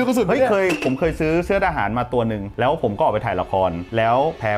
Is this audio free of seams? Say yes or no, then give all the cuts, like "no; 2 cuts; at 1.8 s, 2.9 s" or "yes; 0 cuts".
yes; 0 cuts